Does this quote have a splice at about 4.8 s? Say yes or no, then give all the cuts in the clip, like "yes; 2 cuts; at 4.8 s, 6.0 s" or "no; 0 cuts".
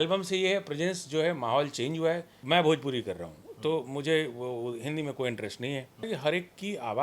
no; 2 cuts; at 2.3 s, 6.1 s